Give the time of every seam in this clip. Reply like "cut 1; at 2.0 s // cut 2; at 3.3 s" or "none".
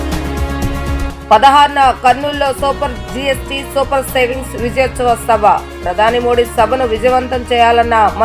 cut 1; at 0.9 s